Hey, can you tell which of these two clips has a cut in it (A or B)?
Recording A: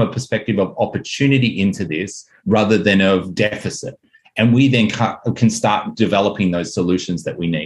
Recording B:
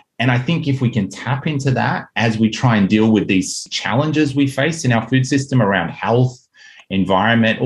B